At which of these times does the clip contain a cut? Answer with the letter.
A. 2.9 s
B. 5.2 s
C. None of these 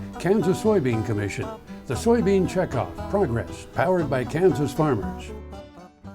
B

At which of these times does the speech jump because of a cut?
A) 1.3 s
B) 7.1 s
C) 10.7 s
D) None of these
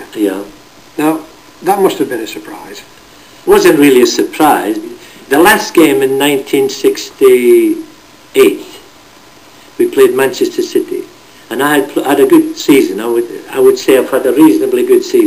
C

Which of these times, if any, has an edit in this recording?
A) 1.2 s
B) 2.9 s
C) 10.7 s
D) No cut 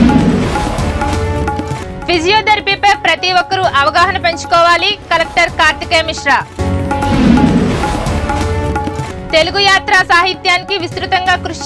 D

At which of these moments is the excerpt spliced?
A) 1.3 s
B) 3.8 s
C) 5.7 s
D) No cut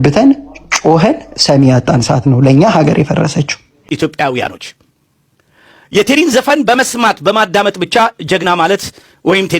B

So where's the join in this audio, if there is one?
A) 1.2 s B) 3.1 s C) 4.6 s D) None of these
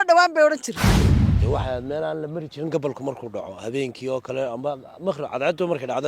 A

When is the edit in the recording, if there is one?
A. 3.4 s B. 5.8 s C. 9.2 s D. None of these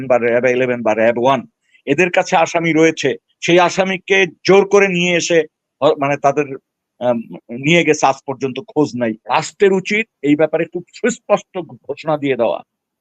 C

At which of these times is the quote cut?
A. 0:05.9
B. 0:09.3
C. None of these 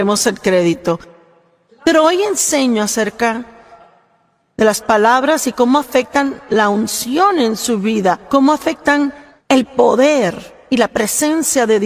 B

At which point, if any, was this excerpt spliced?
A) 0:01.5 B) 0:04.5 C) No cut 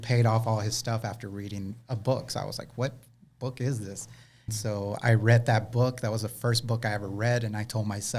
B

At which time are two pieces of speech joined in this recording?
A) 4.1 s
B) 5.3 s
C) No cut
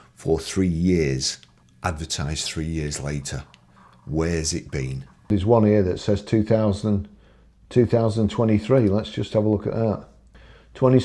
B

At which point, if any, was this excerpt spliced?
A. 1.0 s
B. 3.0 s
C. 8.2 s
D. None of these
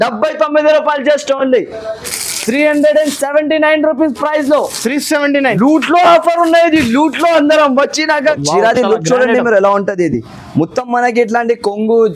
C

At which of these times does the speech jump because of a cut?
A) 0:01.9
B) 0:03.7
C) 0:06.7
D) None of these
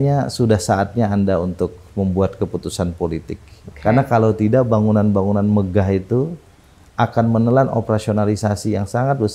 B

